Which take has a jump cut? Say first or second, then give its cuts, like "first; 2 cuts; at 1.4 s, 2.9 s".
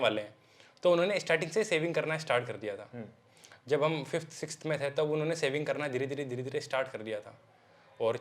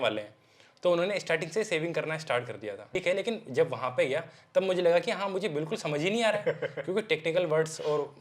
second; 1 cut; at 2.9 s